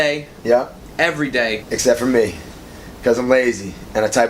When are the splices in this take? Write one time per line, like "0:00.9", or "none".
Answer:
0:01.7